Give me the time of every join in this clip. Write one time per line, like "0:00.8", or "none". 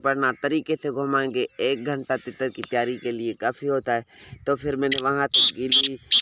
none